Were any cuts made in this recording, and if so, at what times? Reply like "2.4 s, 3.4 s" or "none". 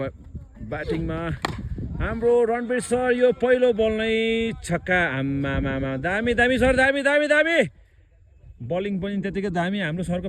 none